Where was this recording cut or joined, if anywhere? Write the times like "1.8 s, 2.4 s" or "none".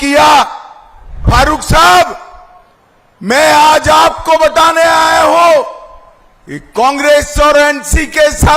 1.2 s